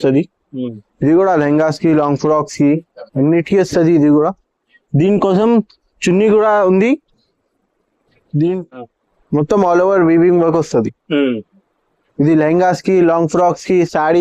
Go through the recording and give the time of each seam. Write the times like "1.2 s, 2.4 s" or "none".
8.9 s